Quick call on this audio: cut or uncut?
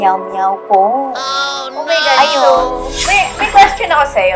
cut